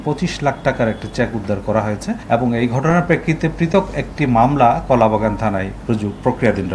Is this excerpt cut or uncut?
cut